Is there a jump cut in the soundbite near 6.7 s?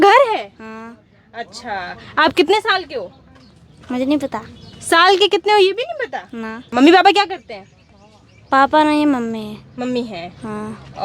yes; 1 cut; at 6.7 s

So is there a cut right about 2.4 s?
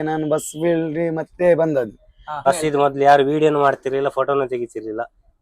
yes; 1 cut; at 2.4 s

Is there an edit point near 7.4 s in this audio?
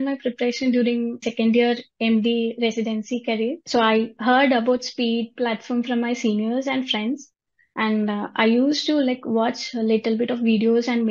no; 2 cuts; at 1.2 s, 3.6 s

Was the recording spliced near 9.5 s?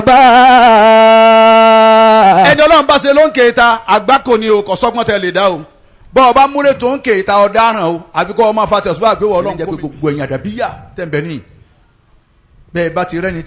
yes; 1 cut; at 9.5 s

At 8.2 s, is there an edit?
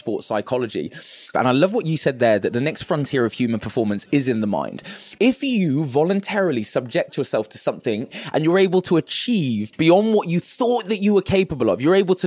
yes; 3 cuts; at 1.3 s, 5.0 s, 8.2 s

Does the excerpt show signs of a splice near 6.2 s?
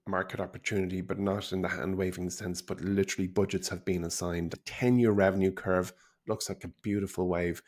no; 1 cut; at 4.6 s

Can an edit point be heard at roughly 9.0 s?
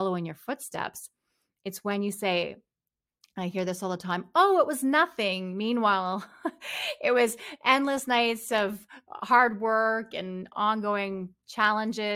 no; 1 cut; at 10.5 s

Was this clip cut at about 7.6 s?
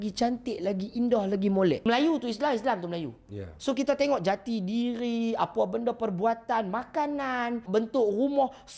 yes; 2 cuts; at 1.8 s, 7.6 s

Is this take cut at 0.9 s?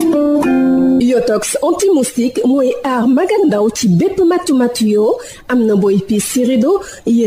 yes; 1 cut; at 0.9 s

